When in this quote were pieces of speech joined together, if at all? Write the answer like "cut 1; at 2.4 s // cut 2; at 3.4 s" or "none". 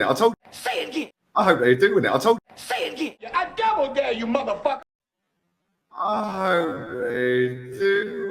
cut 1; at 1.1 s // cut 2; at 2.5 s